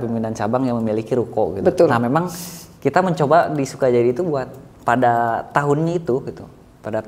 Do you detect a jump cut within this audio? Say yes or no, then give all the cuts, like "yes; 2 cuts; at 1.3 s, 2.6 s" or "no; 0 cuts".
no; 0 cuts